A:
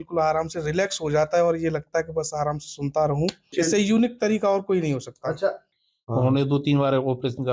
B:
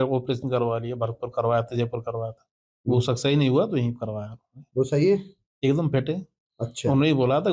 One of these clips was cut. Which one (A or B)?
A